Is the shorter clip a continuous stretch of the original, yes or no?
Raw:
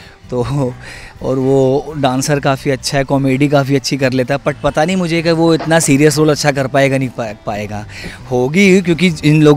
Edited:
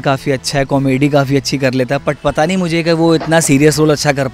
yes